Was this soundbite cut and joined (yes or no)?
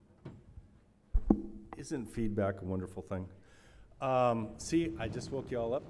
no